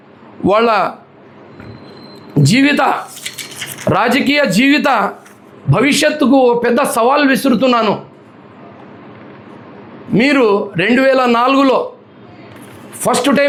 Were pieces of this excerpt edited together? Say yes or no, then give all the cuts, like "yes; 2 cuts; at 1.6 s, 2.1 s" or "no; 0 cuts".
no; 0 cuts